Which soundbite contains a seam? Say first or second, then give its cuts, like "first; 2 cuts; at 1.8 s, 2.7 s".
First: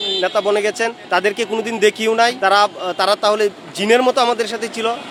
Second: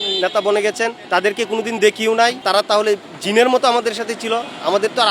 second; 1 cut; at 2.4 s